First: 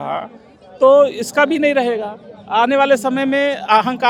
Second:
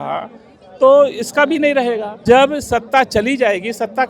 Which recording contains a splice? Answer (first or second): second